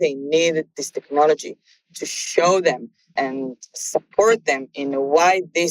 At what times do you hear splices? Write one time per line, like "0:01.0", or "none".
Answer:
0:03.1